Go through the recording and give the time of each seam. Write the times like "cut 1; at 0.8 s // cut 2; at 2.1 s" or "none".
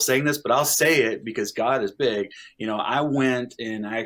none

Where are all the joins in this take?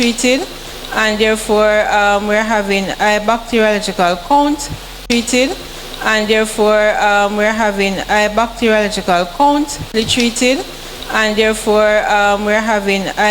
cut 1; at 1.1 s // cut 2; at 4.8 s // cut 3; at 6.2 s // cut 4; at 9.9 s // cut 5; at 11.3 s

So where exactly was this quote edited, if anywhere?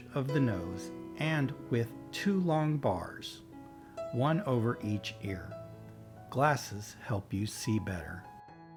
none

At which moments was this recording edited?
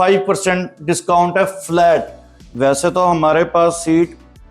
cut 1; at 2.4 s

